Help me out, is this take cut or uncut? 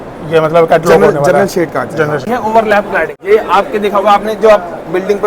cut